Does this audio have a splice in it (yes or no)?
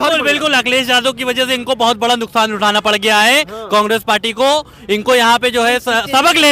no